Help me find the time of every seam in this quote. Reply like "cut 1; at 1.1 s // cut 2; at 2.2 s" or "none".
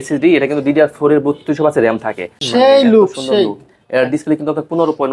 cut 1; at 2.3 s

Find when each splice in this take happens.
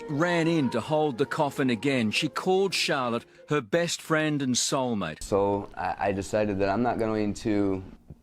cut 1; at 5.1 s

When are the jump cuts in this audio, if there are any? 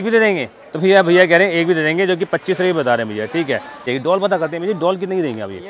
cut 1; at 3.9 s

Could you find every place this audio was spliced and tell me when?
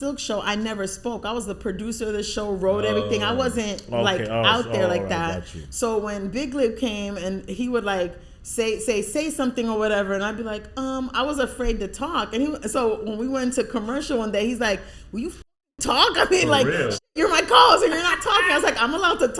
none

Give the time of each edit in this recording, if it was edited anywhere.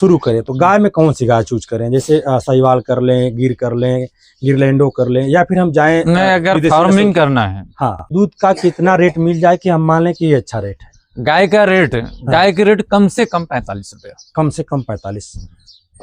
cut 1; at 8.1 s

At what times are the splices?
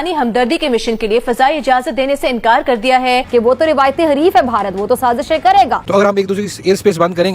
cut 1; at 5.8 s

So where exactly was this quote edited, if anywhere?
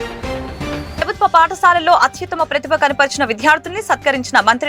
cut 1; at 0.9 s

